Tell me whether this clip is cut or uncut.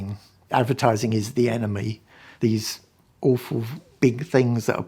cut